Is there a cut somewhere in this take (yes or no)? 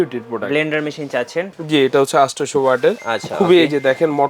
yes